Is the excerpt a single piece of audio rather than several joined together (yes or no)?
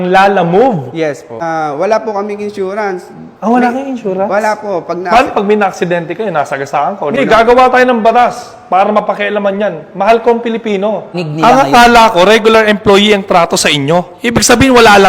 no